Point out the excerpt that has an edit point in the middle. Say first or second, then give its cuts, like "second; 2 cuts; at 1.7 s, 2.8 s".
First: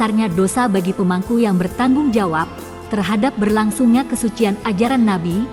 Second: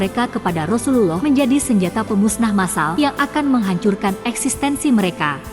second; 2 cuts; at 1.2 s, 2.9 s